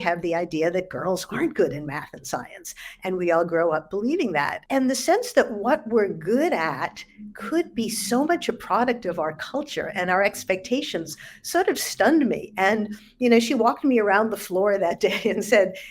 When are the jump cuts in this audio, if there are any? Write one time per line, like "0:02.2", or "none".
0:04.6